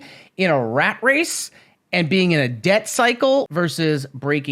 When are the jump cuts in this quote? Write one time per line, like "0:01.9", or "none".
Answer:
0:03.5